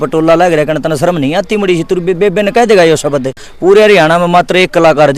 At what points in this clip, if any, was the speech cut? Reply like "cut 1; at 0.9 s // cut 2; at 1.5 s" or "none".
cut 1; at 3.5 s